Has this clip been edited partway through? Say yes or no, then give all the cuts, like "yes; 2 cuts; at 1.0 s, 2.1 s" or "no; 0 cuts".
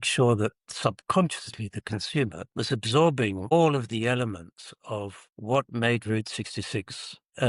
yes; 1 cut; at 2.4 s